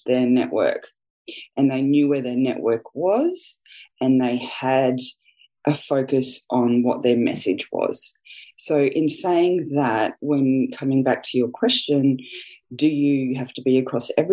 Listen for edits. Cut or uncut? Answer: uncut